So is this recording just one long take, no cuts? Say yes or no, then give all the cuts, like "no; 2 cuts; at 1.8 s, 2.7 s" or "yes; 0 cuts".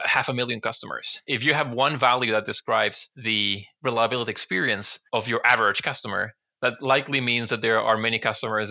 no; 1 cut; at 1.3 s